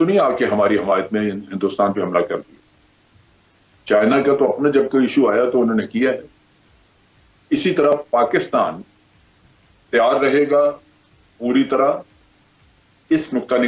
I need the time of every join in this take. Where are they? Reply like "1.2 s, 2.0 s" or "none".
none